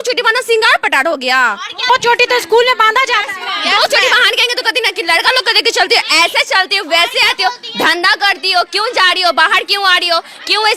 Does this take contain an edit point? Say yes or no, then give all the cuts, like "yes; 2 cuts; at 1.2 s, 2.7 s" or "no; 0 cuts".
no; 0 cuts